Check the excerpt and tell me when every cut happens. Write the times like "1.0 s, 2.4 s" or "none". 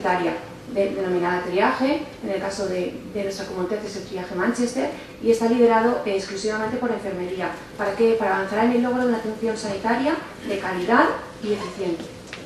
none